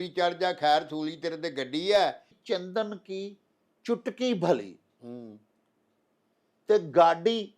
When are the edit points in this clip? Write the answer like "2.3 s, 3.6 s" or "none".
2.3 s